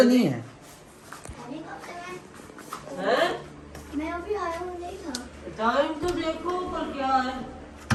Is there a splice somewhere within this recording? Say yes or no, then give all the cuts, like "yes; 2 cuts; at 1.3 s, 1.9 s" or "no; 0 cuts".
no; 0 cuts